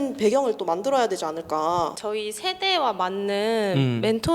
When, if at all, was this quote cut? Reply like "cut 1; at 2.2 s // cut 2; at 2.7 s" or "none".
cut 1; at 2.0 s